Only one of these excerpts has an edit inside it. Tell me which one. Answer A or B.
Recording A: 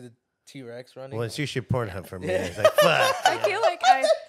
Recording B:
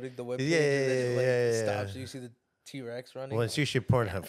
A